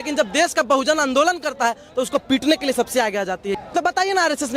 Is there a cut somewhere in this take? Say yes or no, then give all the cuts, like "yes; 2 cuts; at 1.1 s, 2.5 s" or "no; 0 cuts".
yes; 1 cut; at 3.4 s